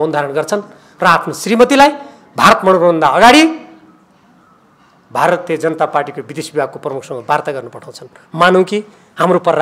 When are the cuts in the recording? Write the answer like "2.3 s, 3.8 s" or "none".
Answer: none

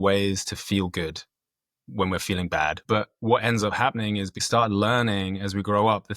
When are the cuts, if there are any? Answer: 2.8 s, 4.4 s

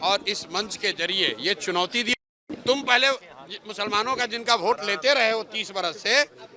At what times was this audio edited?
2.1 s

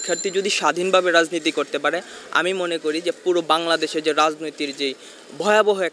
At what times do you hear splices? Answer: none

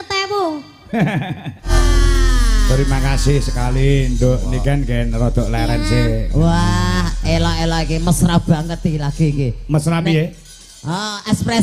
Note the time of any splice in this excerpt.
none

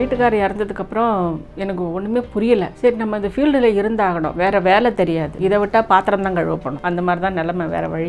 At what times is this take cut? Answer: 2.7 s, 5.3 s, 6.7 s

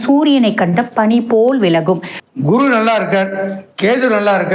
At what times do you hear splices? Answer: 2.1 s

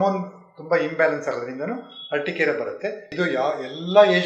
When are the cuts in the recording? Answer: 3.0 s

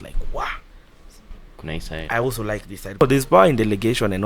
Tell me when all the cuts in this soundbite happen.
3.0 s

